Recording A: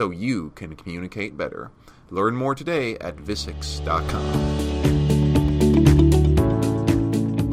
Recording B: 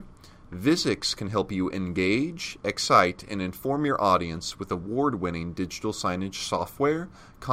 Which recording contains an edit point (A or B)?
A